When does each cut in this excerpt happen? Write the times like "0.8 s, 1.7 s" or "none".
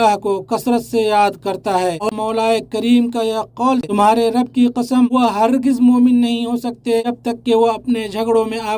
2.1 s, 3.8 s

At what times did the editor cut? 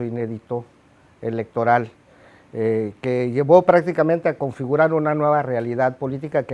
1.5 s

